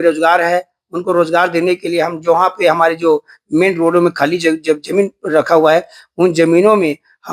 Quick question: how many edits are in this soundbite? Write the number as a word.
zero